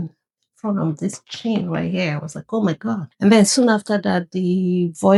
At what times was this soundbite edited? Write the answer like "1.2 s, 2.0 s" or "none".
none